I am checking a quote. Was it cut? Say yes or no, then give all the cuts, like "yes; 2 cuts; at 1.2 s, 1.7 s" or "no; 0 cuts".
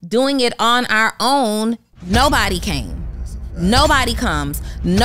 no; 0 cuts